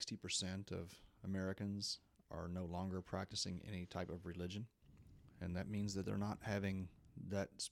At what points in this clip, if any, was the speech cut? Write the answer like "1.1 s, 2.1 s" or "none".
none